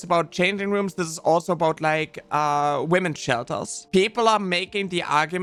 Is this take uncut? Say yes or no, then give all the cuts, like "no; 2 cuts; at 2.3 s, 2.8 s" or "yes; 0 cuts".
yes; 0 cuts